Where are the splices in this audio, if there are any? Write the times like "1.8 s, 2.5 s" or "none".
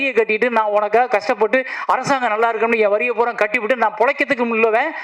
none